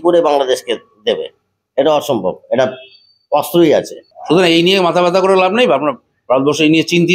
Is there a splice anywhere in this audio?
yes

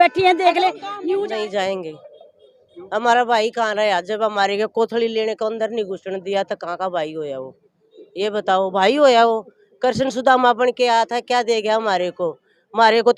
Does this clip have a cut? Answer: yes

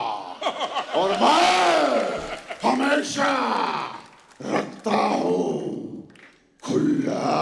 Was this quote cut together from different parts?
no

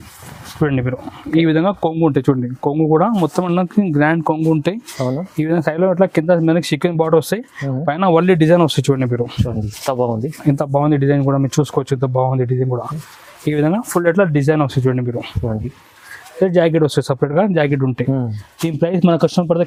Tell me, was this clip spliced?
no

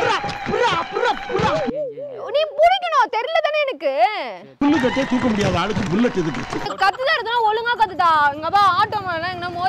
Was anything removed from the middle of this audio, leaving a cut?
yes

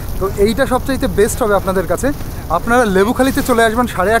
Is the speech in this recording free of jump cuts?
yes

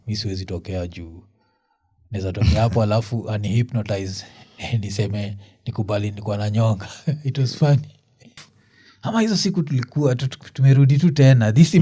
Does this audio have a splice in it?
yes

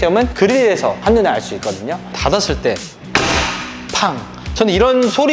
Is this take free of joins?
no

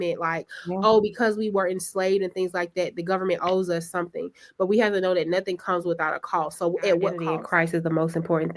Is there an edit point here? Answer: yes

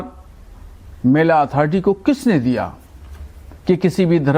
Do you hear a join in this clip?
yes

